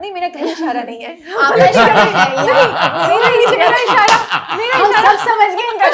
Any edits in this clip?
no; 0 cuts

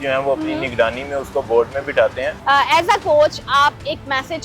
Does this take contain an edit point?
yes; 1 cut; at 2.3 s

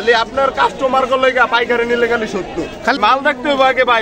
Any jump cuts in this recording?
yes; 1 cut; at 3.0 s

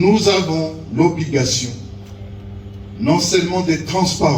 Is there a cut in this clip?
no; 0 cuts

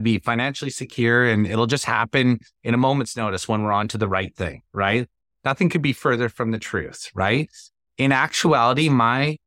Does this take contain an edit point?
no; 0 cuts

